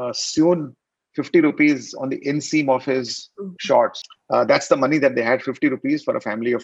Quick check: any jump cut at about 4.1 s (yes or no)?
yes